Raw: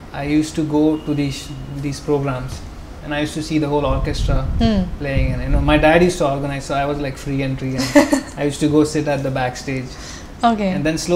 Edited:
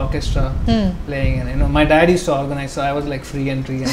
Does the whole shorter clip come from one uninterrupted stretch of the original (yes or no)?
yes